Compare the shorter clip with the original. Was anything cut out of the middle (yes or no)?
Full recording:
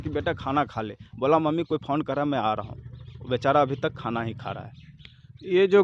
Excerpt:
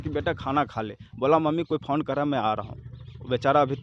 no